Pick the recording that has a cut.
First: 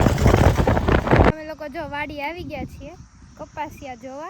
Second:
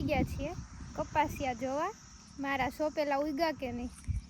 first; 1 cut; at 1.3 s

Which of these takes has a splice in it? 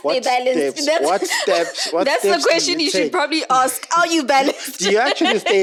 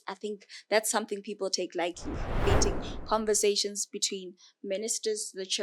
second; 1 cut; at 2.5 s

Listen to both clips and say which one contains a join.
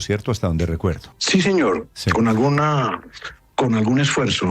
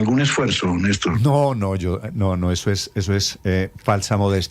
first; 1 cut; at 1.1 s

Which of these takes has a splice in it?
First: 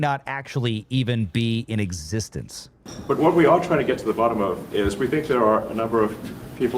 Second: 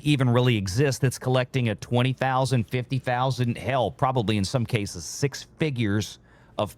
first; 1 cut; at 2.9 s

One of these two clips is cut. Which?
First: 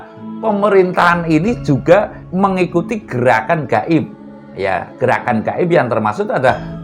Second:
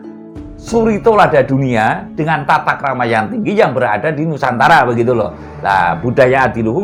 first; 1 cut; at 2.2 s

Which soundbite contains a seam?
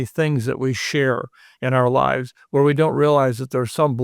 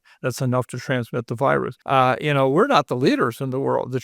second; 1 cut; at 1.8 s

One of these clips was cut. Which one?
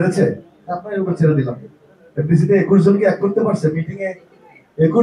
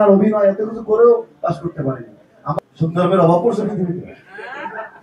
second; 1 cut; at 2.6 s

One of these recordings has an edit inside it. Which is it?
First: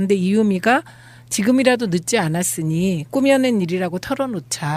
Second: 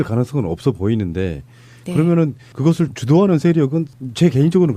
second; 1 cut; at 2.6 s

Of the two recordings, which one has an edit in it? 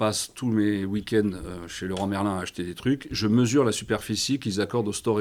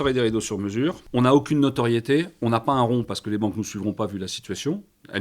second; 1 cut; at 1.0 s

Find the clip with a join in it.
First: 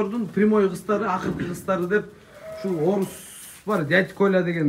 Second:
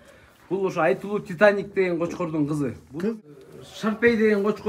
second; 1 cut; at 3.4 s

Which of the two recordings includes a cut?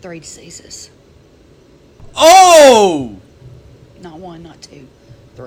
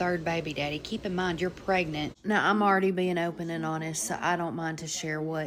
second; 1 cut; at 2.1 s

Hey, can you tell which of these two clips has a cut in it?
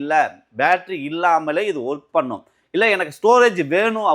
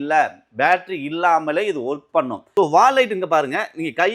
second; 1 cut; at 2.4 s

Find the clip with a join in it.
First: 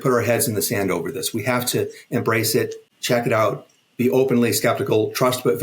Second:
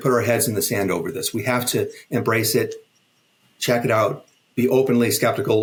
first; 1 cut; at 2.9 s

